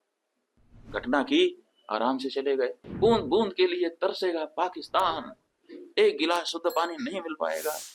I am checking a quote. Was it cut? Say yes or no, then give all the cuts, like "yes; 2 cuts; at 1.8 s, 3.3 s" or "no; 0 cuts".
yes; 1 cut; at 2.8 s